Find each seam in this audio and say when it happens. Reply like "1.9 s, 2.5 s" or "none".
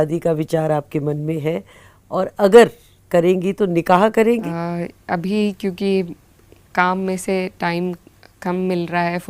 4.4 s